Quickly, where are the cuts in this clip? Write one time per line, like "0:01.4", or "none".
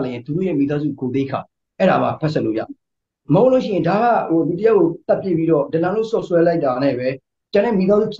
none